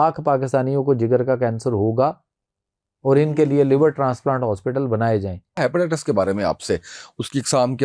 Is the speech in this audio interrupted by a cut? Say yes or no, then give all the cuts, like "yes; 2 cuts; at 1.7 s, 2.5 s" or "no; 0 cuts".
yes; 1 cut; at 5.6 s